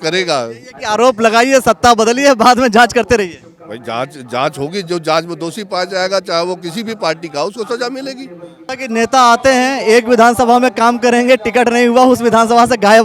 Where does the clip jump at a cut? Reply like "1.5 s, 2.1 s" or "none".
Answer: 8.7 s